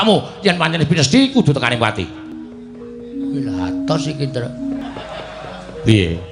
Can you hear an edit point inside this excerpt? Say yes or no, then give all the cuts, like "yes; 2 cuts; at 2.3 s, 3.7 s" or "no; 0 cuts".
yes; 2 cuts; at 2.3 s, 4.9 s